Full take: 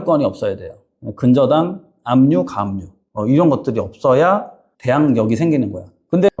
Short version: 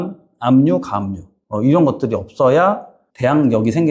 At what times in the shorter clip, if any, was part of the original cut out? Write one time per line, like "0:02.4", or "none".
none